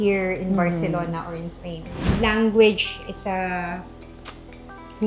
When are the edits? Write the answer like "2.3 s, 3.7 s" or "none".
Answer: 2.1 s